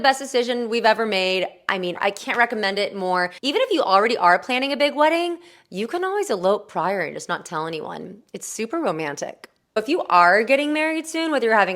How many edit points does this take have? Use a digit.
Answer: 1